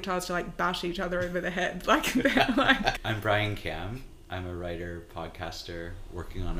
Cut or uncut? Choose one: cut